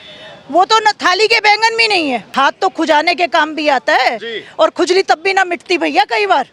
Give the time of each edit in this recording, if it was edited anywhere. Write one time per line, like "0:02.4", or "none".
0:02.3